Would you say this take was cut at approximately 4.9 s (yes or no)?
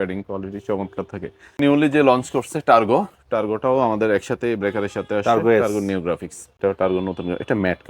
no